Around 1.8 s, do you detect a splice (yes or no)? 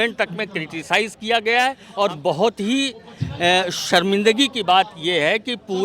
yes